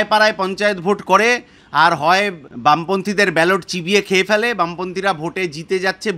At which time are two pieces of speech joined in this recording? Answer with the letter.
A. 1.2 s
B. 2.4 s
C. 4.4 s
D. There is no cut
B